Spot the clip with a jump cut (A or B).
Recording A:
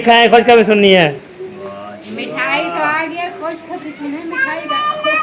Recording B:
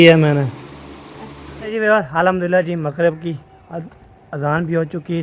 B